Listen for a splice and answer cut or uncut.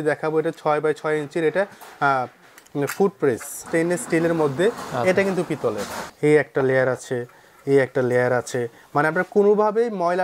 cut